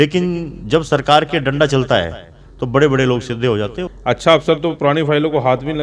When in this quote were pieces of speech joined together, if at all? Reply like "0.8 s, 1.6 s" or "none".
3.8 s